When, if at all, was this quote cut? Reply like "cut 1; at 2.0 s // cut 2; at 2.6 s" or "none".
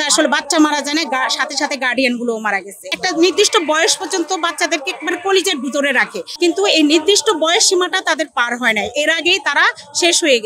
cut 1; at 2.9 s // cut 2; at 6.2 s